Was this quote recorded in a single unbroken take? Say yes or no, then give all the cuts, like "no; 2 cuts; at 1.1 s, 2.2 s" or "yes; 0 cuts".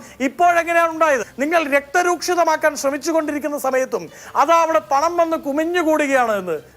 no; 1 cut; at 1.3 s